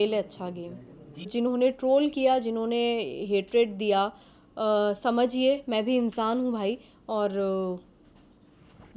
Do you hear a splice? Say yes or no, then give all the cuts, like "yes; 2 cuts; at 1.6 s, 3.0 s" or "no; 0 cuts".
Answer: yes; 1 cut; at 1.3 s